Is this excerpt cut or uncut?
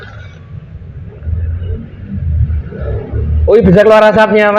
uncut